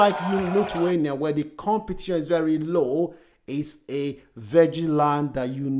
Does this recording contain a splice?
no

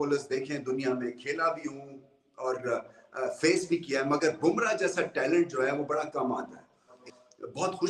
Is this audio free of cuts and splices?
no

